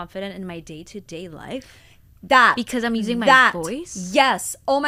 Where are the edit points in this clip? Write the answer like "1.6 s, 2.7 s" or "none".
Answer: none